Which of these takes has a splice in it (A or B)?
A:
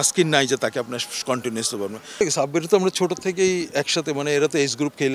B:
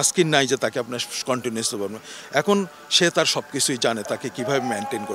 A